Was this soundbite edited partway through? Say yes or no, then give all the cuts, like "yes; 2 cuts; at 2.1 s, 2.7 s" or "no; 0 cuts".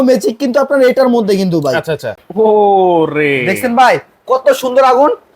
yes; 1 cut; at 2.1 s